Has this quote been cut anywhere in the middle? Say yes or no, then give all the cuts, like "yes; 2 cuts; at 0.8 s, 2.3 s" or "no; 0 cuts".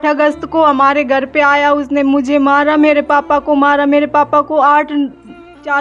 no; 0 cuts